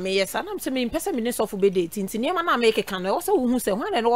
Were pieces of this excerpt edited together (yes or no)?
no